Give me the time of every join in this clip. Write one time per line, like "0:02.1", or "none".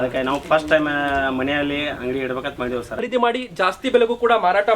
0:02.9